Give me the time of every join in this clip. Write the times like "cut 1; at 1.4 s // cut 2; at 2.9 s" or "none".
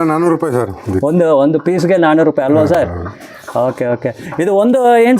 none